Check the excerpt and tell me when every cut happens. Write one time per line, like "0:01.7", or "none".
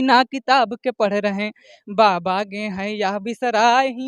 none